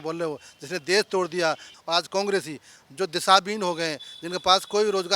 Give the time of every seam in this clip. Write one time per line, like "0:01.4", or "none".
0:01.7